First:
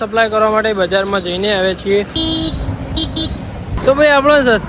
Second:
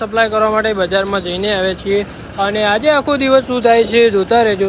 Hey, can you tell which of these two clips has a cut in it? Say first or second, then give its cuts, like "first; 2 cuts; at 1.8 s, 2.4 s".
first; 2 cuts; at 2.2 s, 3.7 s